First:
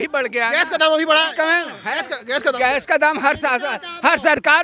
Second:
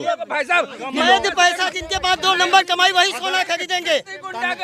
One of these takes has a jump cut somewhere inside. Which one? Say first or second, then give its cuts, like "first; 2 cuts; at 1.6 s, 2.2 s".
second; 1 cut; at 0.9 s